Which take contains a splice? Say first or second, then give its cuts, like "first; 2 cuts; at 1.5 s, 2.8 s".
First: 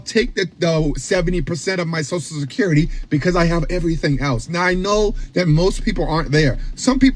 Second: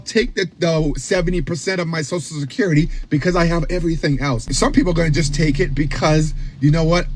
second; 1 cut; at 4.5 s